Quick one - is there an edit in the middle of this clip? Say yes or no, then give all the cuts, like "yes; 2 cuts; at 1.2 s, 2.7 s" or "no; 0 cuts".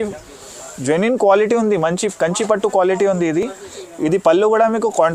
no; 0 cuts